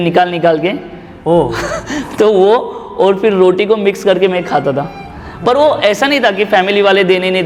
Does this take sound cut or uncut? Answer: uncut